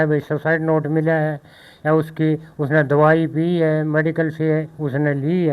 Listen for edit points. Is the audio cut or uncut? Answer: uncut